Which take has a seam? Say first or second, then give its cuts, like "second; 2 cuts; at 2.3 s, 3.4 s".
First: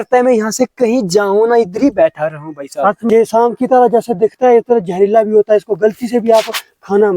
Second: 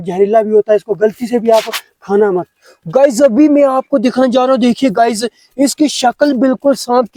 first; 1 cut; at 3.0 s